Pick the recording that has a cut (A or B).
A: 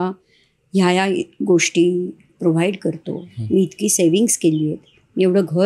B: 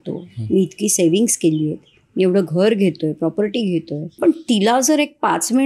B